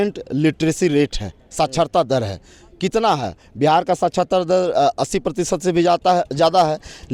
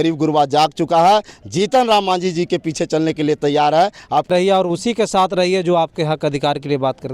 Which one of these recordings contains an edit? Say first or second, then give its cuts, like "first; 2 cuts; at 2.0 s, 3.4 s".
second; 1 cut; at 4.3 s